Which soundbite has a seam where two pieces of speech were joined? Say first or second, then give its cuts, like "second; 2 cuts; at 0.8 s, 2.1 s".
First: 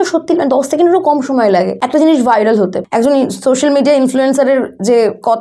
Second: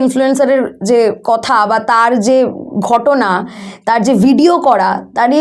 first; 2 cuts; at 1.8 s, 2.8 s